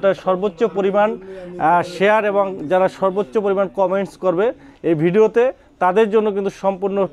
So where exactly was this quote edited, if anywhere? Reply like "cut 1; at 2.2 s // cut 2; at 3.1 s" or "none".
none